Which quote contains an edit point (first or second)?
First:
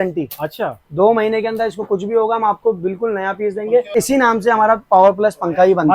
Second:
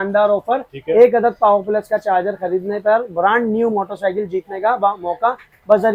first